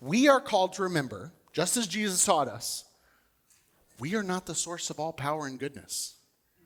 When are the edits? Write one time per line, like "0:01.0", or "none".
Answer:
none